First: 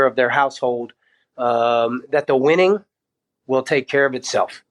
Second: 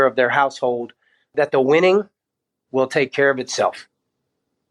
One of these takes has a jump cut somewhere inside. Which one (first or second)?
second